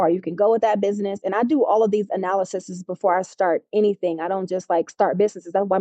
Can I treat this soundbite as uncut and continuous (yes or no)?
yes